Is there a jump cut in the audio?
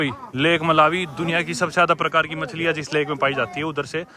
no; 0 cuts

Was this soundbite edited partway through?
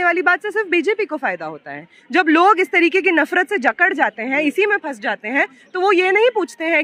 no; 0 cuts

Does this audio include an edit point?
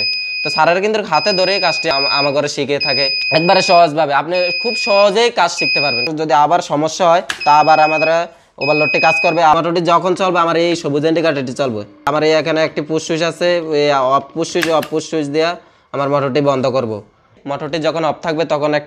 yes; 6 cuts; at 1.9 s, 3.2 s, 6.1 s, 9.6 s, 12.1 s, 17.4 s

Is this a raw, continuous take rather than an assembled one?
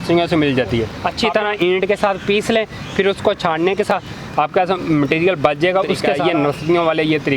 no; 3 cuts; at 1.0 s, 3.9 s, 6.1 s

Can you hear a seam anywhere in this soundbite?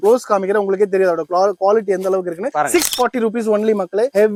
no; 0 cuts

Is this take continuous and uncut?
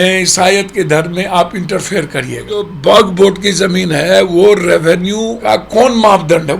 no; 2 cuts; at 2.7 s, 5.3 s

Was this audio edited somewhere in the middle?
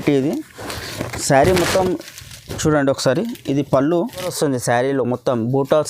yes; 1 cut; at 4.3 s

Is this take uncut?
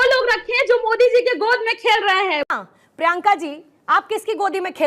no; 1 cut; at 2.5 s

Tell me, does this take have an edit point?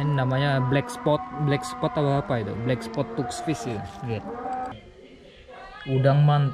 yes; 1 cut; at 4.8 s

